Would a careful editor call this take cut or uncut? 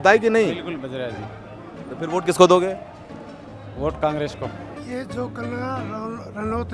cut